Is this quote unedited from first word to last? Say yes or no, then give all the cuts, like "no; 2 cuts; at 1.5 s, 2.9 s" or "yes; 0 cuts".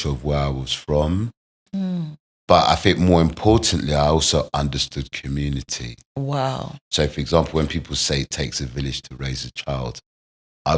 yes; 0 cuts